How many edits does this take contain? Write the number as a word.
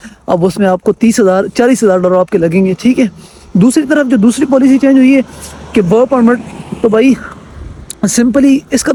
zero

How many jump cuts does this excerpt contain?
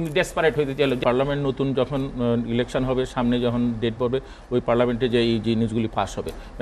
one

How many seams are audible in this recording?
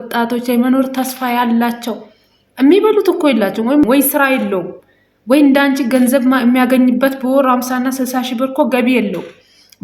one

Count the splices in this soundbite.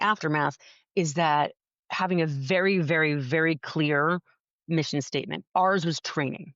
one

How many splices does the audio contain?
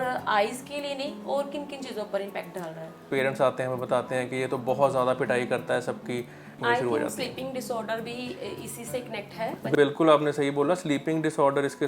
three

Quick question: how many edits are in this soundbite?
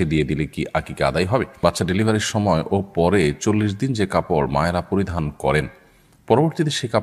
one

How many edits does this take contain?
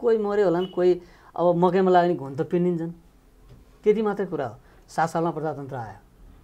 zero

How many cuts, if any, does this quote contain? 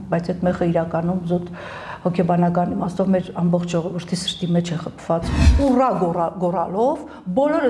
one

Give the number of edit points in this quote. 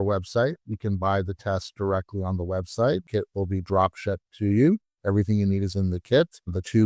one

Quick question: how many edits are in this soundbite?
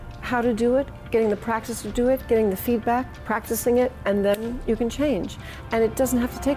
one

